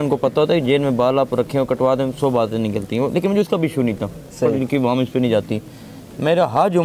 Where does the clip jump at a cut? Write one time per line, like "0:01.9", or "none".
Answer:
none